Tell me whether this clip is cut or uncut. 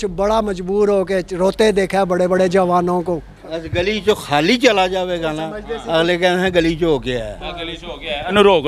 cut